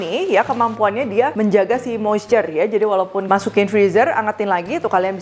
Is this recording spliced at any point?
yes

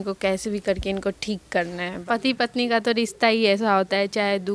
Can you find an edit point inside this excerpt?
yes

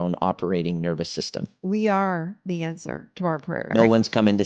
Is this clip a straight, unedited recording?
no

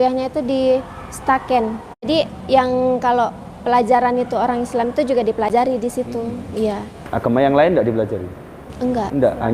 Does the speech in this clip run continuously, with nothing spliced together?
no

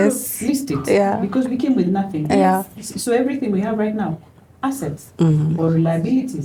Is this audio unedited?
yes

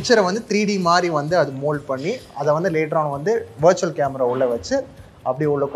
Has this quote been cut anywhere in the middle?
no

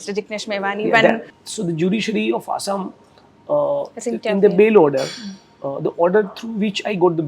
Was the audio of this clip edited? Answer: yes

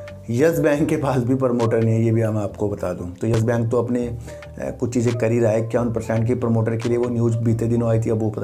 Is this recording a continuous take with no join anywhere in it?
yes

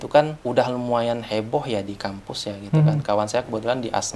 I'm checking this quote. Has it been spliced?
no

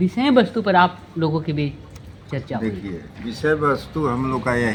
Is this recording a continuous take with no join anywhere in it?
yes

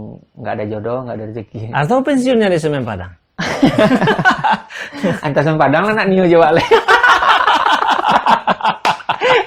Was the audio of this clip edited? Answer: no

